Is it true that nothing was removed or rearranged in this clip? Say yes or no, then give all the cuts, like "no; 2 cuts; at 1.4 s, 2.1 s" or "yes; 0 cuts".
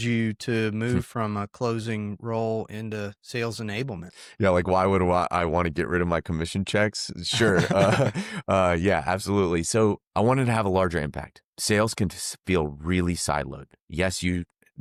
yes; 0 cuts